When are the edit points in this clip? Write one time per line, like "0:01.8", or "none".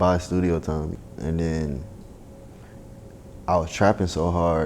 0:01.0